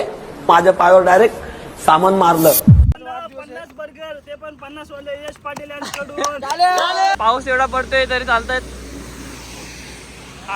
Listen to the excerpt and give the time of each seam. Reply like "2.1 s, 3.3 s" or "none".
2.9 s, 7.2 s